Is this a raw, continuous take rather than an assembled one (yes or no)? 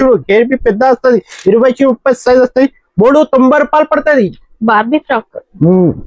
yes